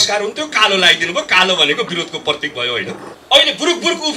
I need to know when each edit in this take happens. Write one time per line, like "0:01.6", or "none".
0:03.1